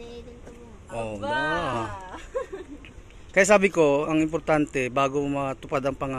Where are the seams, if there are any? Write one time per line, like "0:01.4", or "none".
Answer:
none